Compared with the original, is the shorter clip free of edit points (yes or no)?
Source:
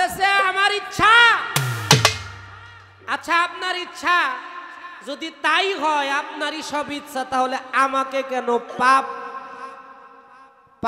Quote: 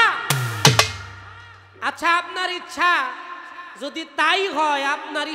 yes